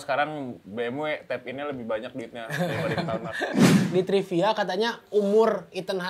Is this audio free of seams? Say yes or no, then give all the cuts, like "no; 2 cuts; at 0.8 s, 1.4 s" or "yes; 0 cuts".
no; 1 cut; at 3.8 s